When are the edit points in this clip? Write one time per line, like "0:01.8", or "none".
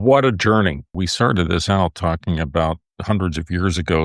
0:01.0